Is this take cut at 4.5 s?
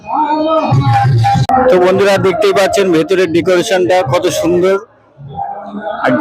no; 1 cut; at 1.4 s

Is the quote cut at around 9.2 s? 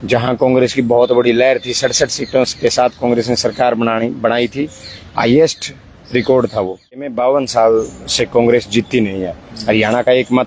no; 1 cut; at 7.1 s

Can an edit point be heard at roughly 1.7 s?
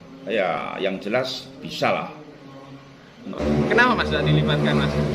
no; 1 cut; at 3.4 s

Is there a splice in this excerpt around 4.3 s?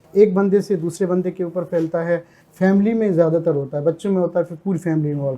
no; 1 cut; at 2.4 s

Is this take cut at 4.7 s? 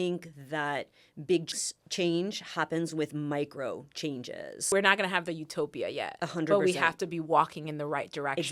yes; 2 cuts; at 1.5 s, 4.7 s

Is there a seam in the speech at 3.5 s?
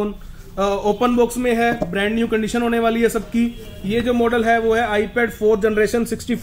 no; 0 cuts

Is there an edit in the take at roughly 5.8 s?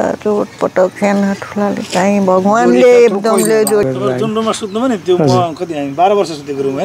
no; 1 cut; at 3.8 s

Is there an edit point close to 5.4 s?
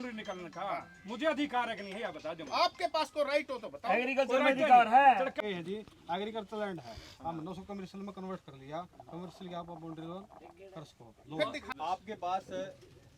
yes; 2 cuts; at 5.4 s, 11.7 s

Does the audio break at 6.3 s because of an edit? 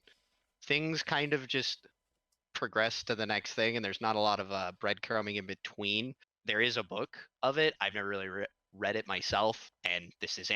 yes; 1 cut; at 6.3 s

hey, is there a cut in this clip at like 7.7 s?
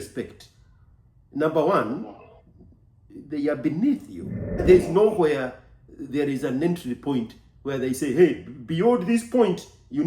no; 1 cut; at 4.6 s

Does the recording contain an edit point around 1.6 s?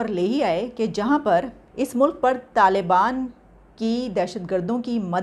yes; 1 cut; at 1.6 s

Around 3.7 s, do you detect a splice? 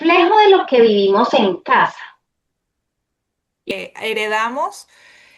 yes; 1 cut; at 3.7 s

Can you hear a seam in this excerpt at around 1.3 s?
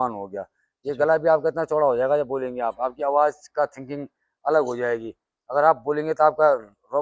no; 0 cuts

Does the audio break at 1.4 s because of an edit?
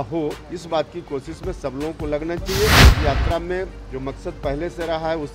no; 1 cut; at 2.8 s

